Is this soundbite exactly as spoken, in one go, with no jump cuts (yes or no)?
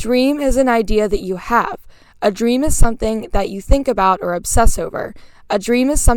yes